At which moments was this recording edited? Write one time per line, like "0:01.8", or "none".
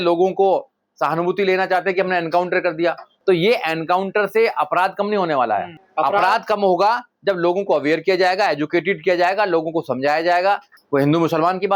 0:10.7